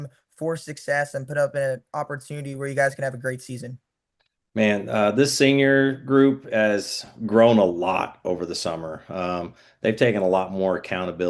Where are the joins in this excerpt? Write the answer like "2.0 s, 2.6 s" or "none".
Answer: 9.3 s